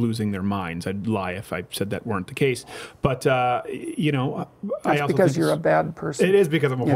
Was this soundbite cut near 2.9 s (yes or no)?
no